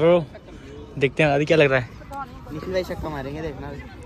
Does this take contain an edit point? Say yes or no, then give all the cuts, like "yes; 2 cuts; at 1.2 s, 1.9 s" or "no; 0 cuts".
no; 0 cuts